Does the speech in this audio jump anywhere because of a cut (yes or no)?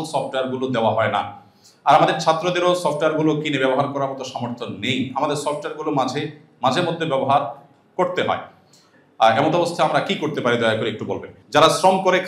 yes